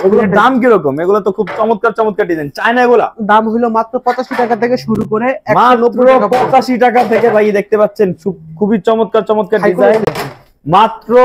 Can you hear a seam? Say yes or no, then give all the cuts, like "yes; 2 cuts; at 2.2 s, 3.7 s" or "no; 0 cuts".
no; 0 cuts